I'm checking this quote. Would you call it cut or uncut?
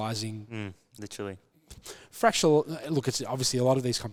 uncut